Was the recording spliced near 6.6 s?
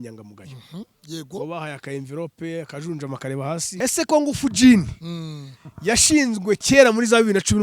no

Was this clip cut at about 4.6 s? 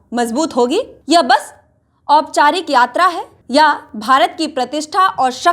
no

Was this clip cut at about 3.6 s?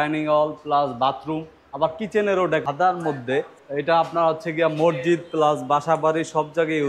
yes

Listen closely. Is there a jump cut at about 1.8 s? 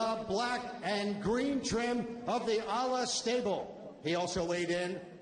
no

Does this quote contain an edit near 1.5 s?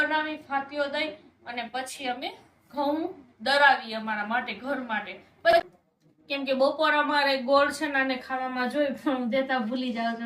no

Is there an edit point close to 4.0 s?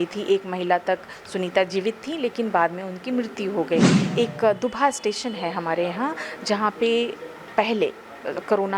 yes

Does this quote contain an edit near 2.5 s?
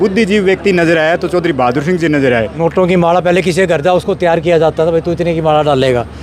yes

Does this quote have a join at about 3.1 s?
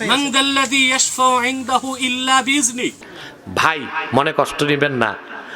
yes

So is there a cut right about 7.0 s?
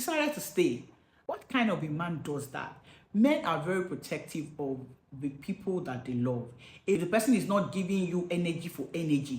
yes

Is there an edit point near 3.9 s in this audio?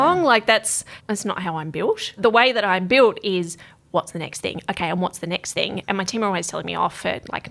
no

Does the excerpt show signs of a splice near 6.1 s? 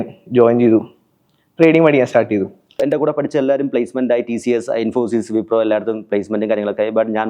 no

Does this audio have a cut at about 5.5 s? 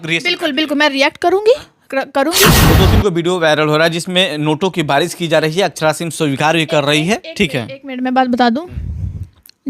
no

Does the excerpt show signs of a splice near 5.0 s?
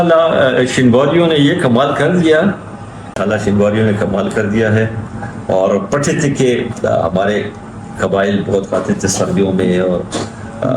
no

